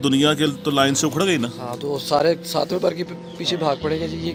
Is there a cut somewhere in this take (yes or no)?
no